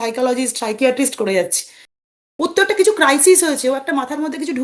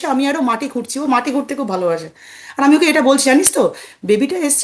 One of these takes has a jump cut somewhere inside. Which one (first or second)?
first